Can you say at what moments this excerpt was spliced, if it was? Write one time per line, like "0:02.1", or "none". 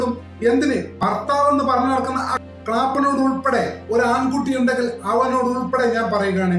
0:00.9